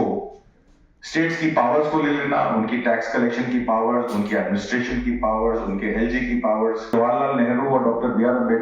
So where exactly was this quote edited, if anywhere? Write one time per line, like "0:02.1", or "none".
0:06.9

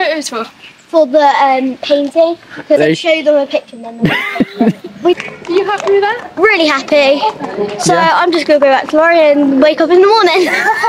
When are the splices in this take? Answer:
0:02.8
0:05.1

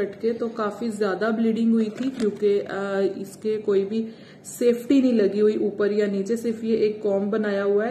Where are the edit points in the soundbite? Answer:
none

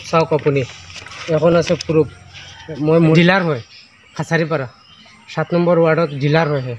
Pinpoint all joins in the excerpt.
0:03.1

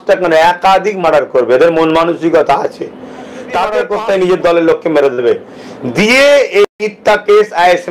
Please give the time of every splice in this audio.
0:03.9

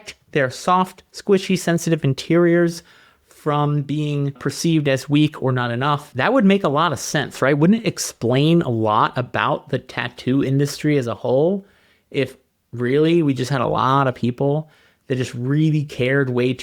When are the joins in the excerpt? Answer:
0:04.3
0:06.1

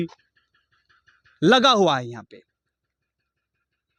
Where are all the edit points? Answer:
none

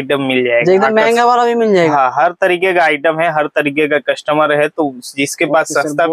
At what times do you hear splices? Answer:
none

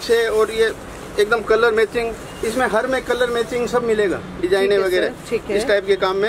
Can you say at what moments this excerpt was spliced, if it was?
none

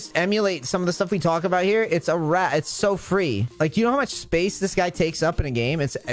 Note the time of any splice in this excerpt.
0:03.5

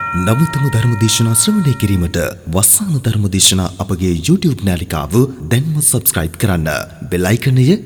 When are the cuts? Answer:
none

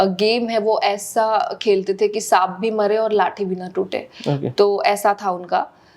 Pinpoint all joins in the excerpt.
none

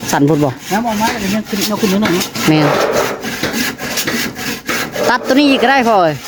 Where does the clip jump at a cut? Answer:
none

